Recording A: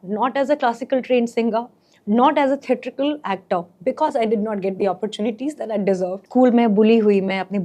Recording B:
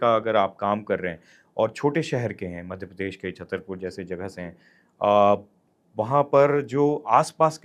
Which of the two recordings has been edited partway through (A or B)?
A